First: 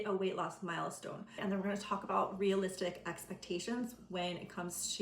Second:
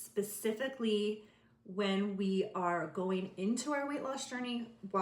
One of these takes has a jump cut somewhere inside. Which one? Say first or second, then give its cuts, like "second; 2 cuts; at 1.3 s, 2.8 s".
first; 1 cut; at 1.4 s